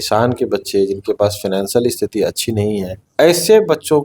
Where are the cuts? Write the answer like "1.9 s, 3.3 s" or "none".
3.0 s